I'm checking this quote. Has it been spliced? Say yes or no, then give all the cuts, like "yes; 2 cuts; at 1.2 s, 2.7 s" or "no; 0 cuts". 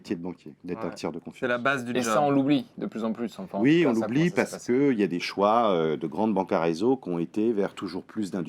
no; 0 cuts